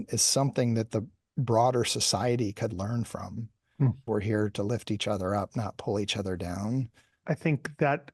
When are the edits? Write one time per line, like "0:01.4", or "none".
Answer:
0:04.0
0:07.2